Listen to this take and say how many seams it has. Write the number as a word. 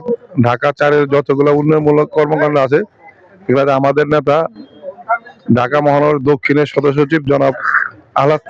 zero